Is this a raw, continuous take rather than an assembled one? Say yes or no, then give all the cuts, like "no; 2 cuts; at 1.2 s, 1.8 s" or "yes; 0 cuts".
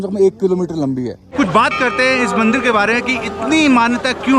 no; 1 cut; at 1.2 s